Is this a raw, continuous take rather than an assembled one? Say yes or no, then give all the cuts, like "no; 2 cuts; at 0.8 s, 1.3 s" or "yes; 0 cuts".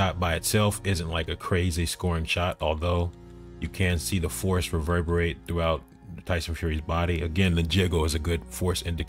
yes; 0 cuts